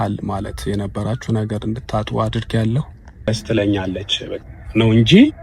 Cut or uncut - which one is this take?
cut